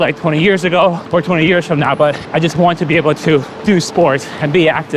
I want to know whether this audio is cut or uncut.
cut